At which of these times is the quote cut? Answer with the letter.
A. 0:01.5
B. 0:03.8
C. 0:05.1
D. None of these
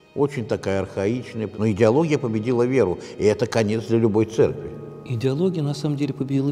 A